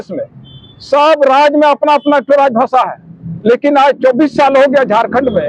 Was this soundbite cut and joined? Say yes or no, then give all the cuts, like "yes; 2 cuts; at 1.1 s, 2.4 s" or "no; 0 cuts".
no; 0 cuts